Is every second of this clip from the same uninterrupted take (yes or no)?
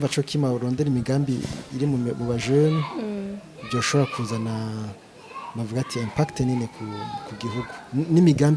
yes